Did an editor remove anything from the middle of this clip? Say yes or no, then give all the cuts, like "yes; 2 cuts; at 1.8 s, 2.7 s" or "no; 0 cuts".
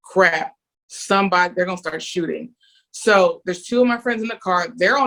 no; 0 cuts